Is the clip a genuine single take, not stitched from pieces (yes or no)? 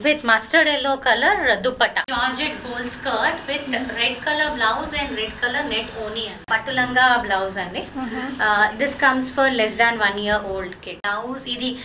no